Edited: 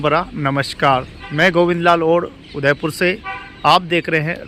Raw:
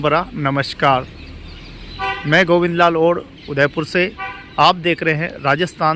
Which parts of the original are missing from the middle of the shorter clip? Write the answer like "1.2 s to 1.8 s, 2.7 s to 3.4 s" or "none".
1.2 s to 2.2 s